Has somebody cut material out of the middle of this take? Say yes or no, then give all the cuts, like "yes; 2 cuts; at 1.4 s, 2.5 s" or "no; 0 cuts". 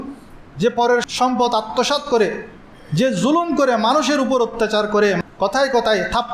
yes; 2 cuts; at 1.1 s, 5.2 s